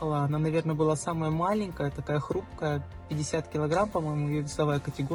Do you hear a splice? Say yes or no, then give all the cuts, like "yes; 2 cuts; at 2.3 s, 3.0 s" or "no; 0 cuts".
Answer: no; 0 cuts